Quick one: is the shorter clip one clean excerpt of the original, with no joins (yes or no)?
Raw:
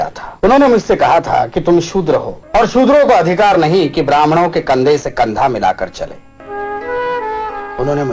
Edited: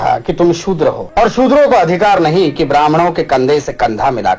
no